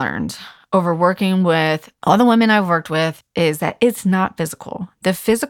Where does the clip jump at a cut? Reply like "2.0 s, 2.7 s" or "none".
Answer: 1.9 s, 3.2 s